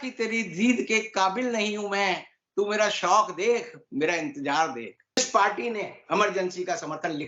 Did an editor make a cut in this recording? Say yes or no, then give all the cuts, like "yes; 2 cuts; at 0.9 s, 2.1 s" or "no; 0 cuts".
yes; 1 cut; at 5.2 s